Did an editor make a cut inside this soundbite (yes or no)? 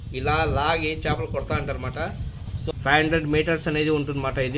yes